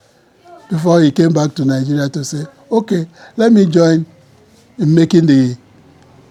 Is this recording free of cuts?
yes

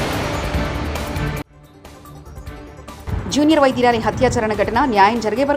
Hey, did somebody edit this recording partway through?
yes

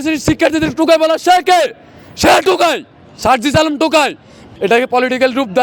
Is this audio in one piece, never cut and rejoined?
no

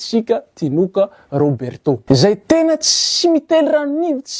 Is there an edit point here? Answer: yes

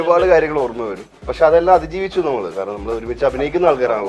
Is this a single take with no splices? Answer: no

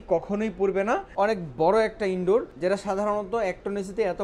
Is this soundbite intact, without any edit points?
no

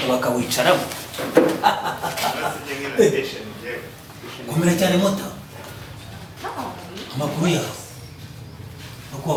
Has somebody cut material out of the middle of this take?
no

